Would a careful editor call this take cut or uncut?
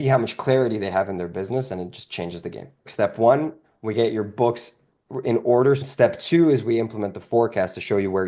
cut